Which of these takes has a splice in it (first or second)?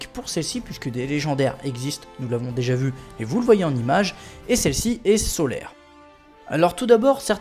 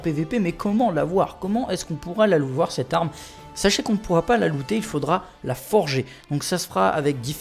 second